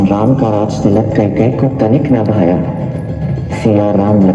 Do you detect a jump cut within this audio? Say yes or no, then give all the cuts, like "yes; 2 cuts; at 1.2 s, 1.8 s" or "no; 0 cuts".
no; 0 cuts